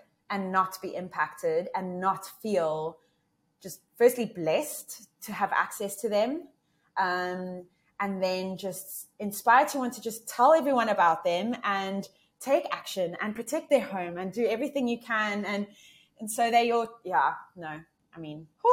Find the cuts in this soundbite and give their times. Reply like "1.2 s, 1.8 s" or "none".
none